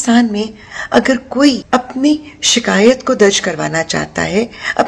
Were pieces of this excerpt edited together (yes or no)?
yes